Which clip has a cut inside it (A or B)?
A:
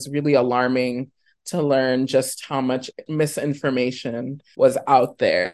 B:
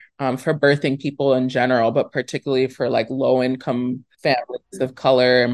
A